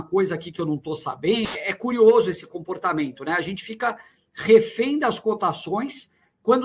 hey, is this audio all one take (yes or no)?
no